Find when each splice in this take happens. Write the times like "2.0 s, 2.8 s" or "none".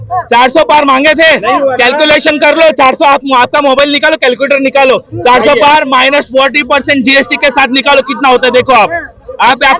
none